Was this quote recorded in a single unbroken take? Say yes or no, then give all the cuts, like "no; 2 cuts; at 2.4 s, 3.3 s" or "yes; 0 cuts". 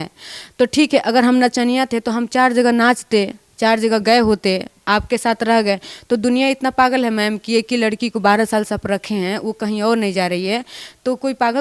yes; 0 cuts